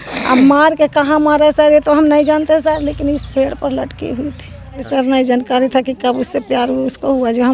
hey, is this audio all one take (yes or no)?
no